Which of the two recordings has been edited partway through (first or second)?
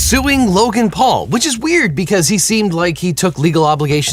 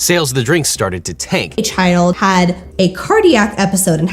second